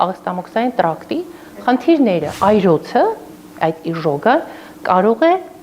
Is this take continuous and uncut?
no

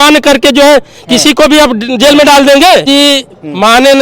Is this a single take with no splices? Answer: no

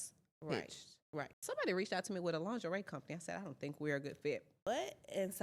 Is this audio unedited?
no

